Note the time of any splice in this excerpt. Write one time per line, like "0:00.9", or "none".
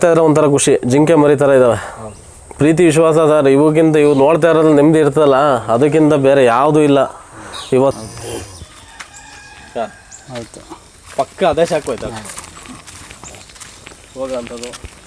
0:07.9